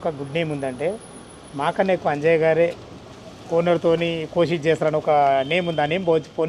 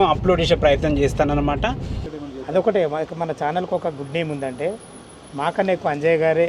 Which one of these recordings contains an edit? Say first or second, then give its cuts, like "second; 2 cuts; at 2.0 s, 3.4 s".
second; 1 cut; at 2.0 s